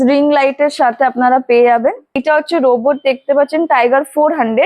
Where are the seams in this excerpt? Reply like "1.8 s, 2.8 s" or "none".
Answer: 2.2 s